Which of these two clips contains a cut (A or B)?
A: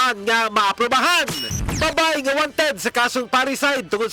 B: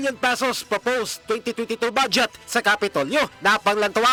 A